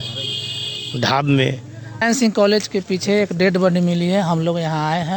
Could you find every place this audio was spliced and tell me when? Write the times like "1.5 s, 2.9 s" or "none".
2.0 s